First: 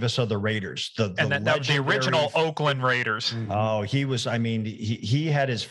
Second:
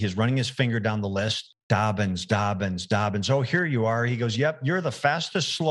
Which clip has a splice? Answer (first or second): second